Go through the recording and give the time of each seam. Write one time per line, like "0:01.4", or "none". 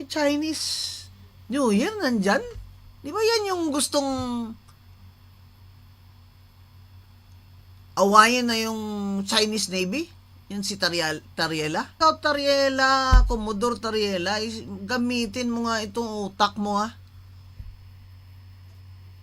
0:11.9